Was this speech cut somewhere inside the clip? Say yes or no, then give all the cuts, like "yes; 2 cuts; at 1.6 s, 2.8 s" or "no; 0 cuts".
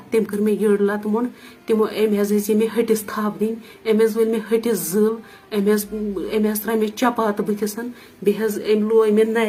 no; 0 cuts